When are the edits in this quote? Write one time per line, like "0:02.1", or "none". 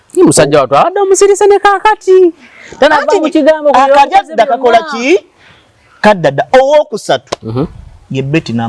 none